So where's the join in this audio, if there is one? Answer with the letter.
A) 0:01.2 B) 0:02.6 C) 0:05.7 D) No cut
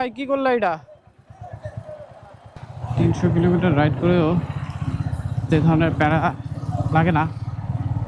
B